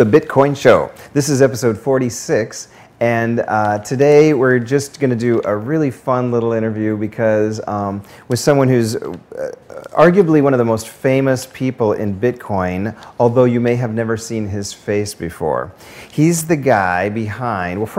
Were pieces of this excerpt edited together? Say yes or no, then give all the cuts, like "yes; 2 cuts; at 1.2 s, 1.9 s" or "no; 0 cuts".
yes; 1 cut; at 16.6 s